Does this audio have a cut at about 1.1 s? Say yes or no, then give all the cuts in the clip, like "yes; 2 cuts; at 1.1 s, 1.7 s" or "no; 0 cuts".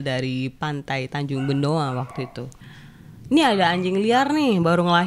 no; 1 cut; at 2.5 s